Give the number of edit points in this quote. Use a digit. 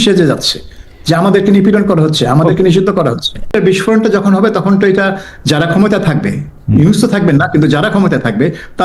1